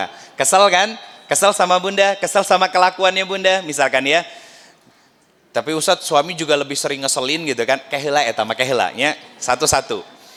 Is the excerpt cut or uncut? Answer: uncut